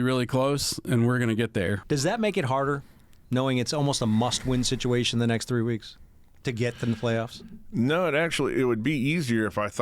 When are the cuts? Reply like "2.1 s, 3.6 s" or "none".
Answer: 1.8 s